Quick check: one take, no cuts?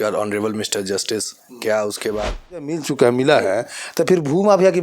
no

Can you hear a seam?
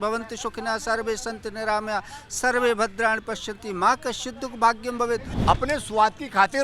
yes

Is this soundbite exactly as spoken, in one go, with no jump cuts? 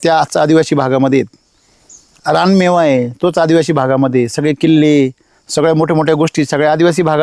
no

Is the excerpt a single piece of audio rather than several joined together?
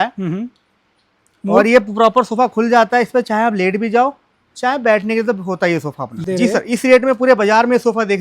no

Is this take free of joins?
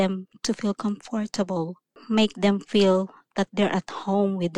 yes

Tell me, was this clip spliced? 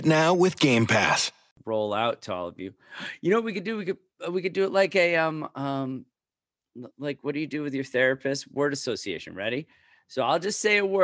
yes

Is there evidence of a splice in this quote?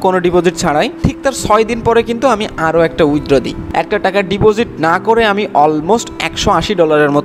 yes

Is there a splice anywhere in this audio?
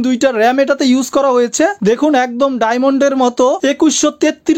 no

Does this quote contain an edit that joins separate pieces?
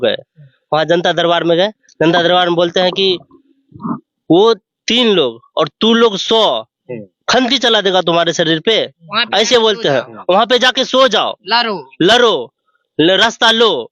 no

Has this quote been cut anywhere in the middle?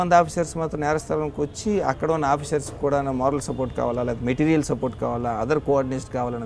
no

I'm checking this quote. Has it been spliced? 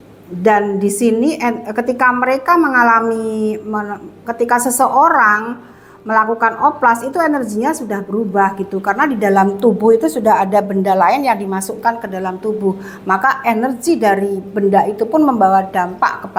no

